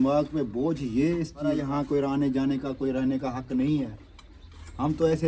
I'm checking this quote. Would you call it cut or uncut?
cut